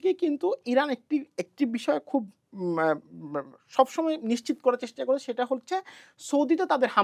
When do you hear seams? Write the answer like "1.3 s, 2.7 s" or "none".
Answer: none

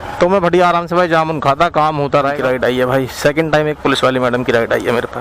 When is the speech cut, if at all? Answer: 2.4 s

